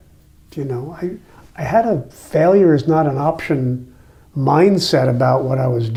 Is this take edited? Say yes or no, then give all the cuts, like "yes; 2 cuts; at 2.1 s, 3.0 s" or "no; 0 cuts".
no; 0 cuts